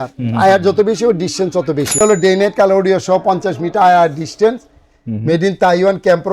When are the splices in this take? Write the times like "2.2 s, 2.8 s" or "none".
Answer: 2.0 s